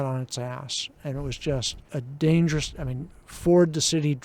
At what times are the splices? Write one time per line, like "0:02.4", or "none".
0:01.8